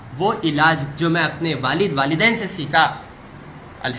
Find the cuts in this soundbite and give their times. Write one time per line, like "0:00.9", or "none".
none